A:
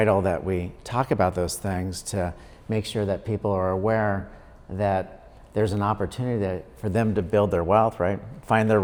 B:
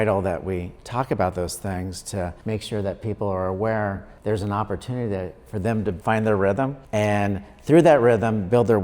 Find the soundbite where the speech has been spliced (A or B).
B